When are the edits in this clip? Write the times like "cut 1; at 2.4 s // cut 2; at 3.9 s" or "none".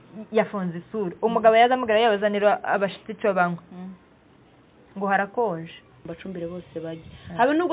cut 1; at 6.1 s